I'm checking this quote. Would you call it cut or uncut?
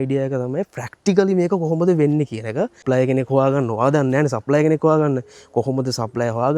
cut